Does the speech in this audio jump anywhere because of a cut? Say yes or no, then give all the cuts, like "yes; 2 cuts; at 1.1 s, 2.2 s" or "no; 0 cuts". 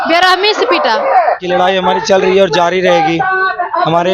yes; 1 cut; at 1.4 s